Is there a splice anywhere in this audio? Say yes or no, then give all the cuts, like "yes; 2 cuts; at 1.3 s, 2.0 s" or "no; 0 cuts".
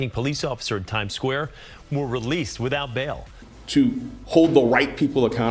no; 0 cuts